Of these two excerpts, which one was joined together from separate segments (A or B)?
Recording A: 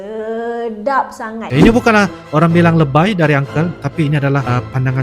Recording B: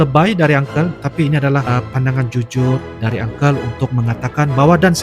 A